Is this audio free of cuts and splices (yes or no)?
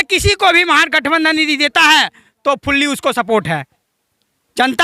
yes